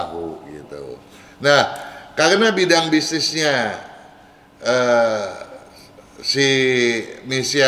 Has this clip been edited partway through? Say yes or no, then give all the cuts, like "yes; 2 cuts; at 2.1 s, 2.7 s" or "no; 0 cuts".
no; 0 cuts